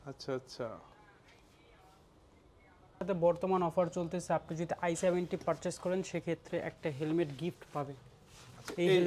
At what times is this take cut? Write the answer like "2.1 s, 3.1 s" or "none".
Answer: 3.0 s